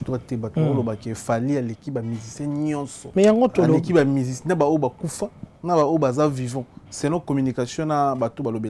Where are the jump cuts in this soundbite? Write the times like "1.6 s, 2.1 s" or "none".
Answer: 3.0 s